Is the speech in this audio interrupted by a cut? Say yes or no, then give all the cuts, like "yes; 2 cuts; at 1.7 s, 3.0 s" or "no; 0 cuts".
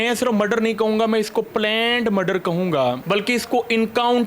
yes; 1 cut; at 3.0 s